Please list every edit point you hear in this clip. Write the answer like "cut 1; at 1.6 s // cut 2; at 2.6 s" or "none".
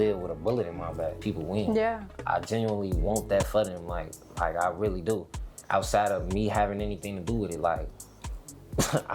cut 1; at 1.2 s